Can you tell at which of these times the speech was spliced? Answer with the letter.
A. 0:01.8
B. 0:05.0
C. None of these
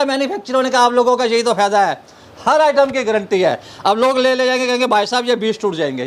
C